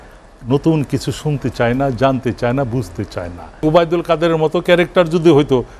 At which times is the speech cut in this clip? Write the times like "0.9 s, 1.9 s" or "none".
3.6 s